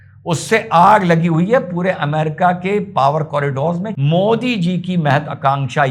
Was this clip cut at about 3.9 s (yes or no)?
yes